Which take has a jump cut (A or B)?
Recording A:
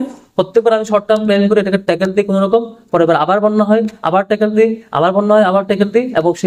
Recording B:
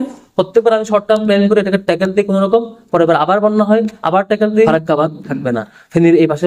B